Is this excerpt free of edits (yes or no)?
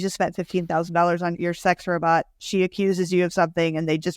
no